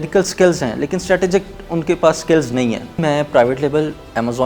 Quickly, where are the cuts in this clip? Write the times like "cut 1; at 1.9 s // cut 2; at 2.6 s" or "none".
cut 1; at 3.0 s